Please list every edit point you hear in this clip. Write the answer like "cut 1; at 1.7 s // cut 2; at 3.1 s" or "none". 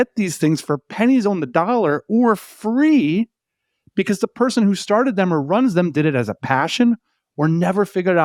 none